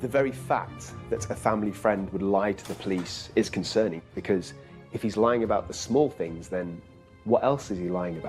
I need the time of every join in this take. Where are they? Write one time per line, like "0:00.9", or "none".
0:04.0